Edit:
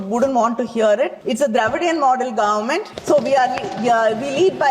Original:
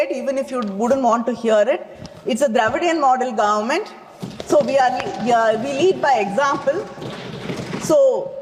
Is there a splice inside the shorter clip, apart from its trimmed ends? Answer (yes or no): yes